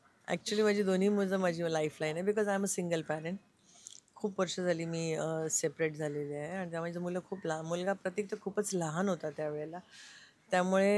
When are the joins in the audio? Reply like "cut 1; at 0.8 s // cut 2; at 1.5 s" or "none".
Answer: none

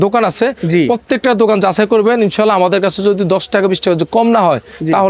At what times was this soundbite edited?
none

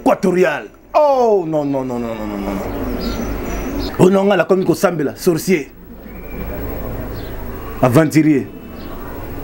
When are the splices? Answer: cut 1; at 3.9 s

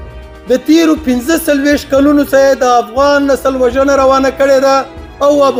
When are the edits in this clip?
none

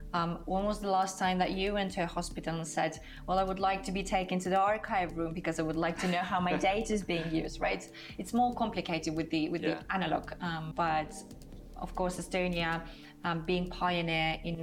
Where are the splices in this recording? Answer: cut 1; at 10.7 s

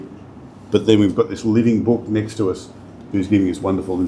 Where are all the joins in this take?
none

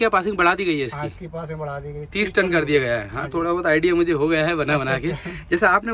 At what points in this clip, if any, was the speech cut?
none

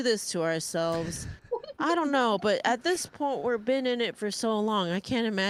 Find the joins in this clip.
none

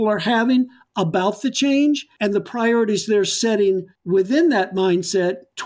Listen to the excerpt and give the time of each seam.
cut 1; at 2.1 s // cut 2; at 3.9 s

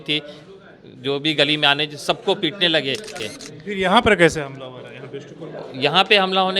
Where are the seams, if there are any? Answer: cut 1; at 3.2 s

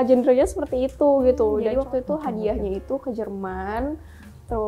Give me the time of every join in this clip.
cut 1; at 1.7 s

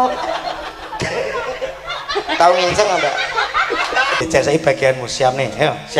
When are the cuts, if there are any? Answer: cut 1; at 4.2 s

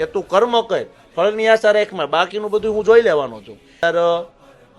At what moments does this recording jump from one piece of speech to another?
cut 1; at 3.8 s

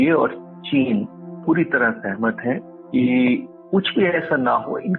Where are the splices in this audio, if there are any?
cut 1; at 1.4 s // cut 2; at 2.7 s // cut 3; at 3.5 s

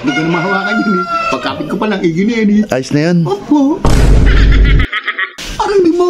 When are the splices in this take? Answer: cut 1; at 3.8 s // cut 2; at 5.2 s

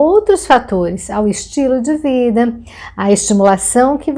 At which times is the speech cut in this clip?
none

